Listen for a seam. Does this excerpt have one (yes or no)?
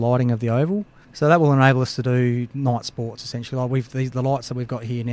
yes